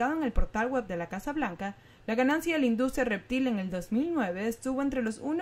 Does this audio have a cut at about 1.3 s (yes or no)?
no